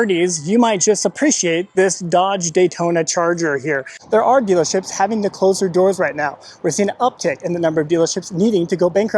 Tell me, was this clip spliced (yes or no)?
yes